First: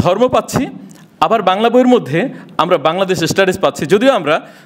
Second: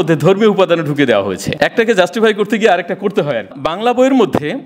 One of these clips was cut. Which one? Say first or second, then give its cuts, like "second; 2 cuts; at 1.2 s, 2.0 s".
second; 2 cuts; at 1.4 s, 3.5 s